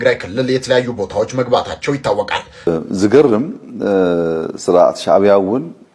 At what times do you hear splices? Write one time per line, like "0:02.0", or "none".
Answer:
0:02.7